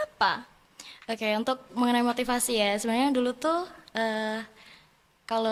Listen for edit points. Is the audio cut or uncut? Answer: uncut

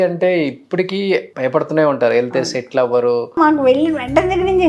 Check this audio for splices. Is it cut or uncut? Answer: cut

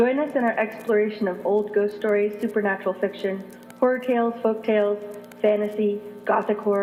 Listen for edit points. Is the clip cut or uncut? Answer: uncut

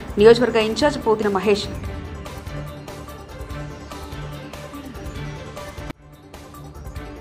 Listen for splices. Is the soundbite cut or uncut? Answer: uncut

